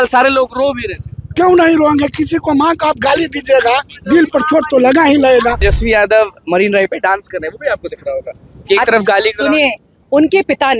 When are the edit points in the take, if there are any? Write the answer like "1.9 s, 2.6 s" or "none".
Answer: 5.7 s

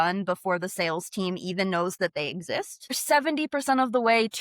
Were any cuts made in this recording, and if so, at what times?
3.0 s

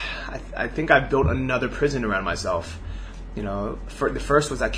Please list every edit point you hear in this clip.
none

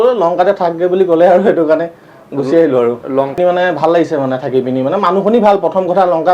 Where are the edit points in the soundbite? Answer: 3.3 s

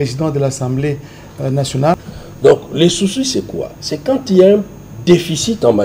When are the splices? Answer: 1.9 s

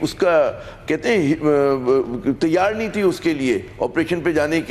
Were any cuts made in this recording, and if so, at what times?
none

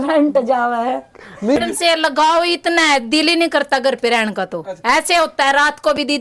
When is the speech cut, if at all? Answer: 1.6 s

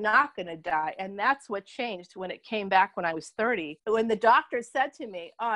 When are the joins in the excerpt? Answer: 3.8 s

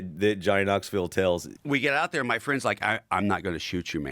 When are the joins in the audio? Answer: 1.5 s

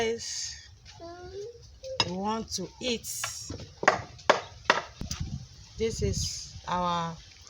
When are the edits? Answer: 5.1 s

